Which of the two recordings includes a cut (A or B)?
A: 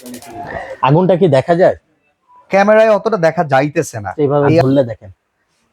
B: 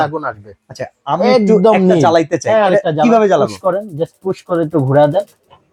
A